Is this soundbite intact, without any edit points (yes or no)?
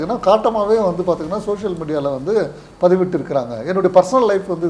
yes